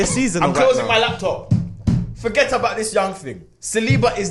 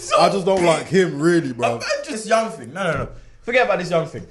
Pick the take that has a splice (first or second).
second